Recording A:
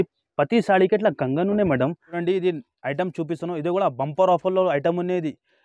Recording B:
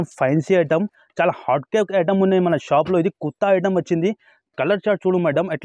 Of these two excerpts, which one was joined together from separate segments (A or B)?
A